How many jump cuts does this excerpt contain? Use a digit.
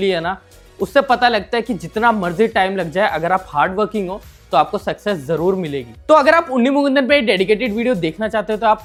0